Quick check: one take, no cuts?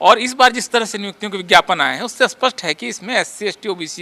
yes; 0 cuts

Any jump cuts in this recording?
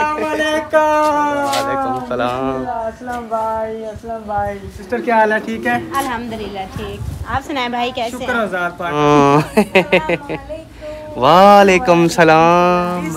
yes; 3 cuts; at 2.8 s, 4.8 s, 9.0 s

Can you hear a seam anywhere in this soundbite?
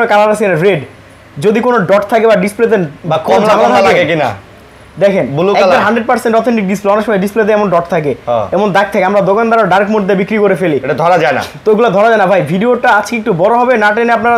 no; 0 cuts

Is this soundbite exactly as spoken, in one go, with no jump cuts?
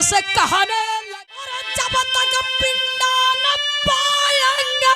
no; 1 cut; at 1.0 s

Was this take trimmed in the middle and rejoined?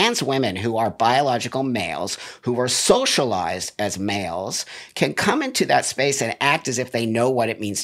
no; 0 cuts

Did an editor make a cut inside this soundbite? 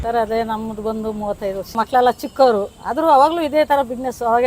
yes; 1 cut; at 1.7 s

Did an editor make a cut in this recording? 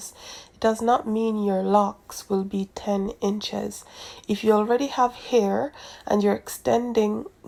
no; 0 cuts

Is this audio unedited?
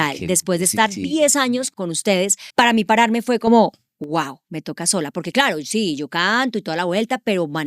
no; 1 cut; at 2.1 s

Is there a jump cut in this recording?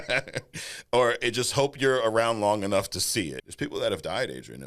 yes; 1 cut; at 3.4 s

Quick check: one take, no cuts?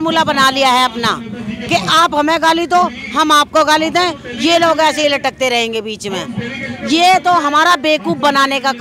yes; 0 cuts

